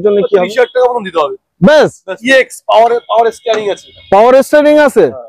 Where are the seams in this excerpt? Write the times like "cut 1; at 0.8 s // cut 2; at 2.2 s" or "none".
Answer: cut 1; at 2.2 s